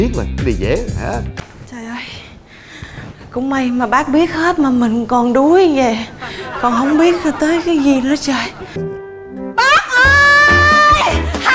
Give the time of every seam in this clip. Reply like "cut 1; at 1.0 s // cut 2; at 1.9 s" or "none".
cut 1; at 1.3 s // cut 2; at 8.8 s